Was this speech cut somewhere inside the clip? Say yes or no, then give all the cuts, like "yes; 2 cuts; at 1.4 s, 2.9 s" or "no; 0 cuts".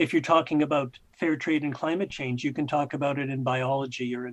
yes; 1 cut; at 1.0 s